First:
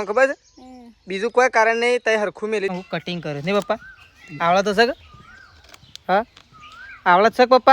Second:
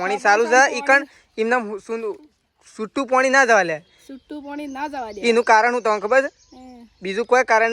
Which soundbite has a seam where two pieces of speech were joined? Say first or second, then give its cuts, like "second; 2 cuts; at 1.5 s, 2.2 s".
first; 1 cut; at 2.7 s